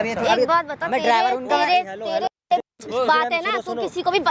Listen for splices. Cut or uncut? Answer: uncut